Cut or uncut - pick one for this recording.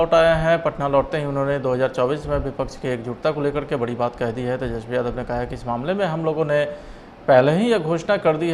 uncut